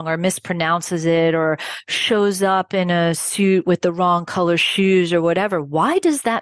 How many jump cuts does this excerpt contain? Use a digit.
0